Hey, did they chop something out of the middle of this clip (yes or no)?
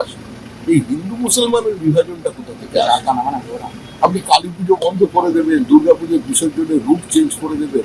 no